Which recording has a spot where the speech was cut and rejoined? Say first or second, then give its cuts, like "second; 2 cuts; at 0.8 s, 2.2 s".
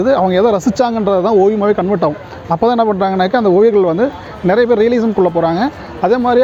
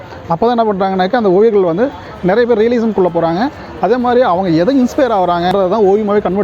second; 1 cut; at 5.5 s